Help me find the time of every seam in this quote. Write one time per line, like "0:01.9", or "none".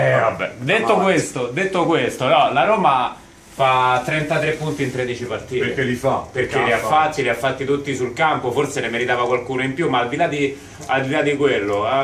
0:01.6